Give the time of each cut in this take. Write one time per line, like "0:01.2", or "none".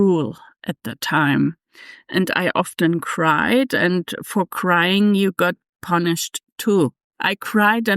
0:07.1